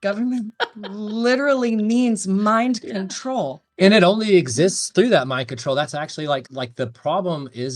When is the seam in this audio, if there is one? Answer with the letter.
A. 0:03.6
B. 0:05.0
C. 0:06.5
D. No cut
C